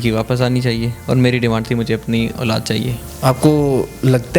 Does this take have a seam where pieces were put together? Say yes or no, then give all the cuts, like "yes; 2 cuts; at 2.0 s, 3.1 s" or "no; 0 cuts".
yes; 1 cut; at 3.1 s